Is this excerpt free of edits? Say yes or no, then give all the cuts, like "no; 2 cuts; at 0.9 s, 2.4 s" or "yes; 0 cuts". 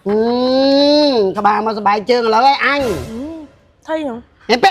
yes; 0 cuts